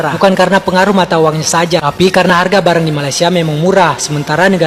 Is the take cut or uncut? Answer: uncut